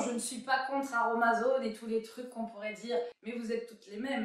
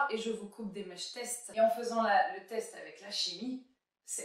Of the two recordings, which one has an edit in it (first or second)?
first